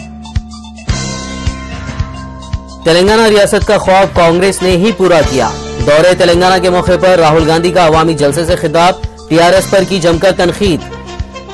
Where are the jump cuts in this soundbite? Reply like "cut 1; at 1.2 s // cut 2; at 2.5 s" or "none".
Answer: cut 1; at 2.4 s

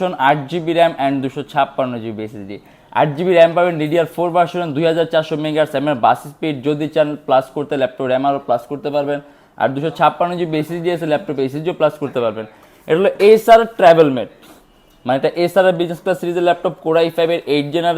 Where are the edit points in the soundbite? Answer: none

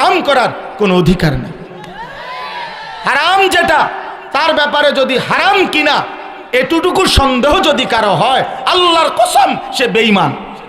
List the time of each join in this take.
none

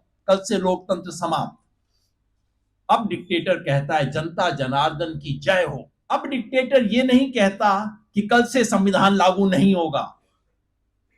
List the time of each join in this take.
cut 1; at 5.9 s

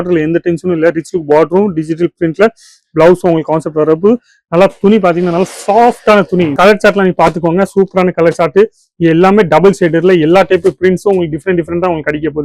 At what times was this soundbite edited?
cut 1; at 6.5 s

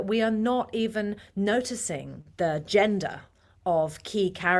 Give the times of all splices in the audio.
cut 1; at 2.2 s

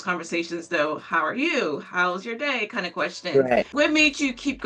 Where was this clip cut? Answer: cut 1; at 3.7 s

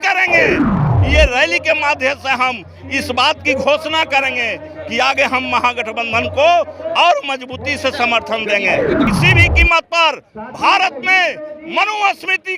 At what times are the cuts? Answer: cut 1; at 0.9 s // cut 2; at 9.1 s

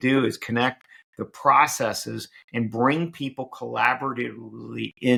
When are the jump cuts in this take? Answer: none

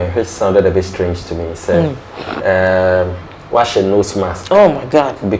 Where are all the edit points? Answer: none

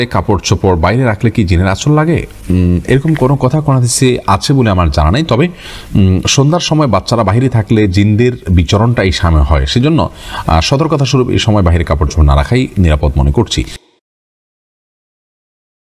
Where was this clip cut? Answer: none

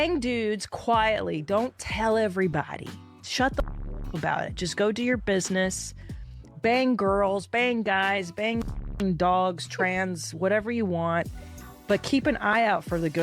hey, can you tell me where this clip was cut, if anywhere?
cut 1; at 11.5 s

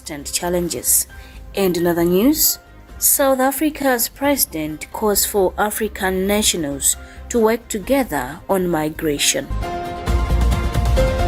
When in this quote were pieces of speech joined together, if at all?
none

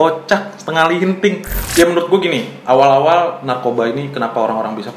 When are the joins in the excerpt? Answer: cut 1; at 1.5 s

